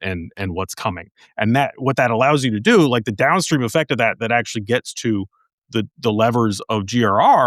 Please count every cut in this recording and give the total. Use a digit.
0